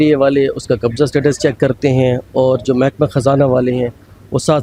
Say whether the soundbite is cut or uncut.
uncut